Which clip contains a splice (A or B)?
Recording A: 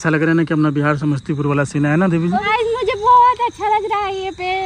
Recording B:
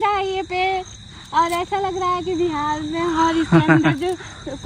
A